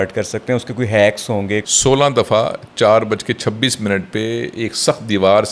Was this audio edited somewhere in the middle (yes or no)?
yes